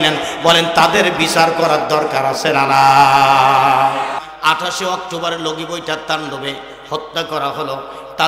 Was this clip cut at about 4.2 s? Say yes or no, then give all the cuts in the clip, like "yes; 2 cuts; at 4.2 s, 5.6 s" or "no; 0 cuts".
yes; 1 cut; at 4.2 s